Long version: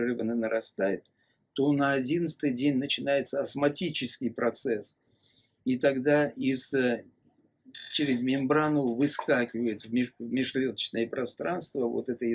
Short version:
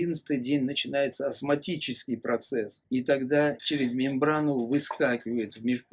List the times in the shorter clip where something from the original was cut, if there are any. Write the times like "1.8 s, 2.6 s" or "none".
2.8 s, 3.6 s

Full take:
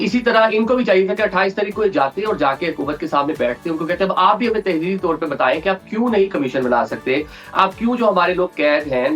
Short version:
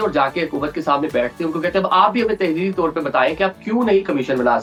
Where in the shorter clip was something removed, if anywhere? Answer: none

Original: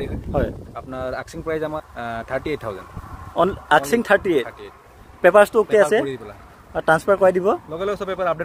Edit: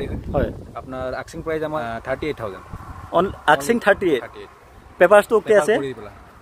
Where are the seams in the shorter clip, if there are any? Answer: 1.8 s

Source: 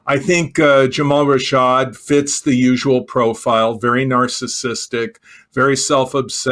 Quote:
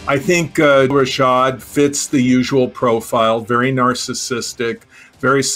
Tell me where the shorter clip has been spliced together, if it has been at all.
0.9 s

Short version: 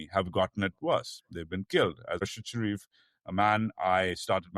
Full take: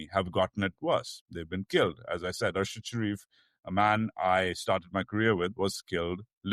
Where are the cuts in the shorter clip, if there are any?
2.2 s

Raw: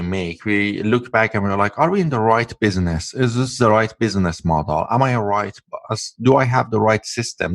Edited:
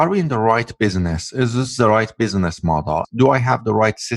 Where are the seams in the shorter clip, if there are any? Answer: 3.0 s

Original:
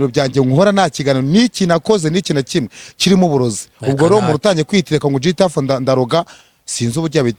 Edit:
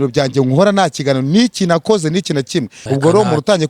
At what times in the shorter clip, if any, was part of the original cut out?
2.8 s

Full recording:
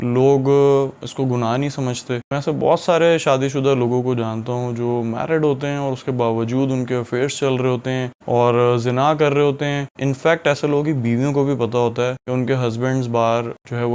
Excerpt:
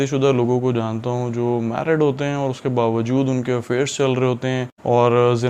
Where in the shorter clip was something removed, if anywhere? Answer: none

